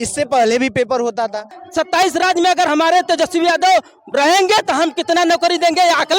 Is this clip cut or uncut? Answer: cut